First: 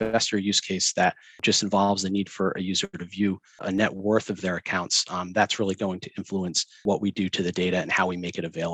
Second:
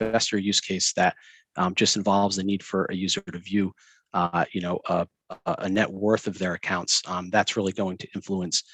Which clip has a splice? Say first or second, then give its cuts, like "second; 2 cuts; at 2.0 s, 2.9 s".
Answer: first; 3 cuts; at 1.4 s, 3.6 s, 6.7 s